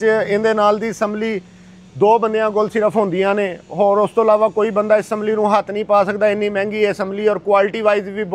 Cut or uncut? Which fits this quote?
uncut